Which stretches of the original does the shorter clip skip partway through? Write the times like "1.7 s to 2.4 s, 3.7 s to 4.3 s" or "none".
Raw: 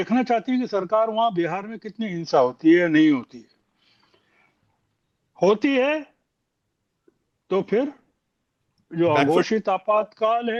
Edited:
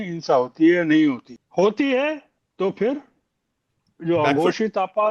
3.4 s to 5.2 s, 6.2 s to 7.3 s